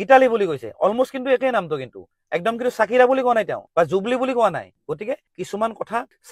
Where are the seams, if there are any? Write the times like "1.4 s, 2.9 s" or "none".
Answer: none